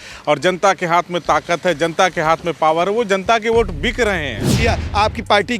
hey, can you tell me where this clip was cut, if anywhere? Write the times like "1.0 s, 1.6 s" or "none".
4.5 s